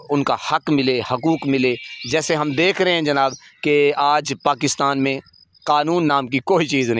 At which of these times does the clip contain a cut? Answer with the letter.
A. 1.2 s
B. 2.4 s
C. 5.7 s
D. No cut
D